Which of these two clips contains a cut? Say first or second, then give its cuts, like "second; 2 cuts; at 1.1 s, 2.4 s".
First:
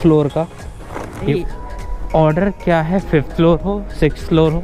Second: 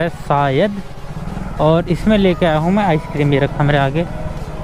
first; 1 cut; at 1.3 s